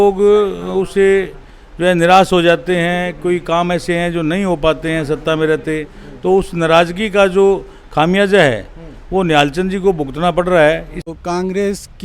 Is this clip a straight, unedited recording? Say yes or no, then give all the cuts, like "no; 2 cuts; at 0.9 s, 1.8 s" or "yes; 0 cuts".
no; 1 cut; at 11.1 s